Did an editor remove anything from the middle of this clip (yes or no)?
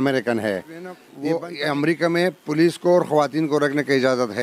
yes